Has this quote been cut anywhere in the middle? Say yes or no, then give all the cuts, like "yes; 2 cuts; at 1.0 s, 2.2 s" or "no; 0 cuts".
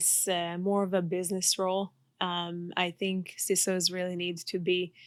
no; 0 cuts